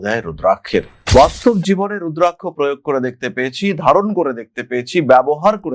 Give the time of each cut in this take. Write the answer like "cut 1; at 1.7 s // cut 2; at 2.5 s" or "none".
cut 1; at 1.0 s